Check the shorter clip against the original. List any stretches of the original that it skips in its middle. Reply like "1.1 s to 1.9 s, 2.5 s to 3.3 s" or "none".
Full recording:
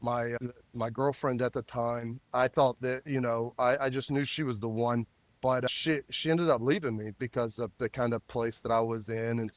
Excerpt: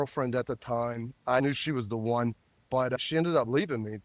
2.5 s to 4.1 s, 5.8 s to 6.2 s

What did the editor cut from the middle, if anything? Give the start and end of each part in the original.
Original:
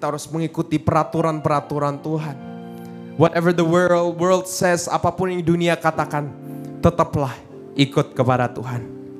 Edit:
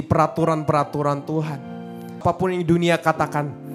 3.0 s to 5.0 s

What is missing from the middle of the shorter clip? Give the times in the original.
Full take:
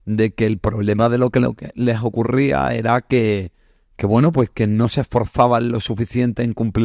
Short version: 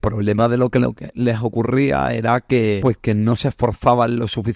3.4 s to 4.3 s

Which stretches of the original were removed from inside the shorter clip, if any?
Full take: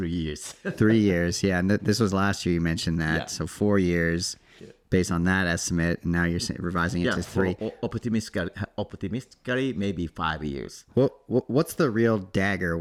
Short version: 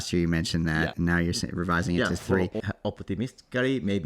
3.3 s to 6.0 s, 7.7 s to 8.6 s

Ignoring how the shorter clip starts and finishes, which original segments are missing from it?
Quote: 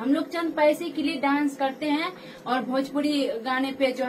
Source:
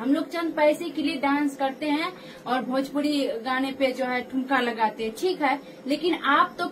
none

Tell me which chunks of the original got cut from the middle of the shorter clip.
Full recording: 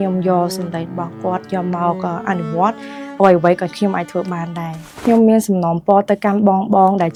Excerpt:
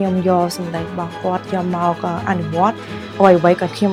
none

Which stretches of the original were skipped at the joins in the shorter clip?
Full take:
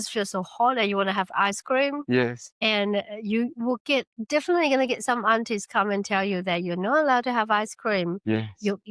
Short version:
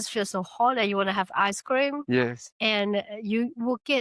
none

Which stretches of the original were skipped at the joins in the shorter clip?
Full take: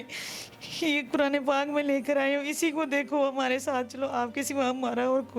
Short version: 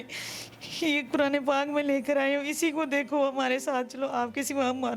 none

